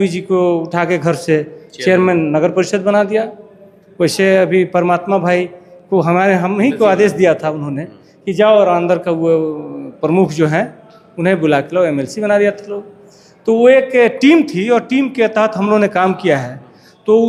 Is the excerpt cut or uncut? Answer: uncut